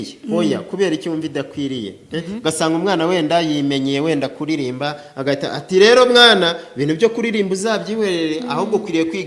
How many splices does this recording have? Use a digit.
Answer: 0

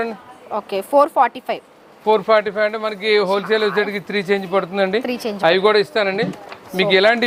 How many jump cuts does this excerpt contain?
0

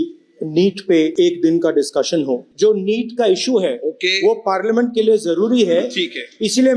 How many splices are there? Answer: 2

